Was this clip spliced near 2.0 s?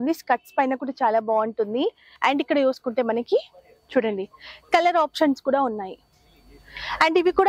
yes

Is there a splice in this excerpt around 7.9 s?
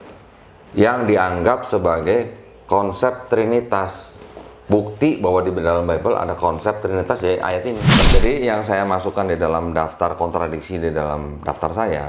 yes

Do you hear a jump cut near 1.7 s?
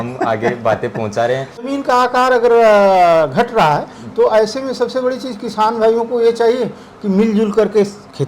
yes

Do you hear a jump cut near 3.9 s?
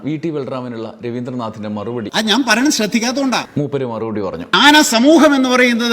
yes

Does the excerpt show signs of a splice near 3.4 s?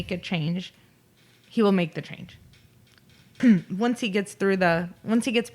yes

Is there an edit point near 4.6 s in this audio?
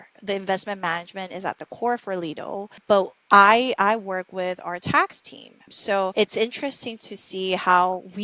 no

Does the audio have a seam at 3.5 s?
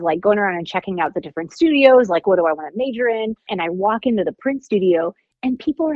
yes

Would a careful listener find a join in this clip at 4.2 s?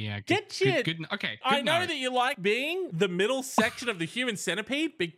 no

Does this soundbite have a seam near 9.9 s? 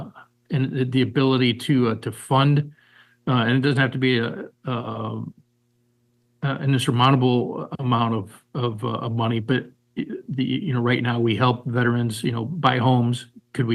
no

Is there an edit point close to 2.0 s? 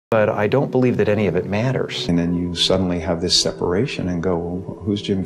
yes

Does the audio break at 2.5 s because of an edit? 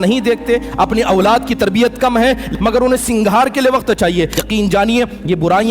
yes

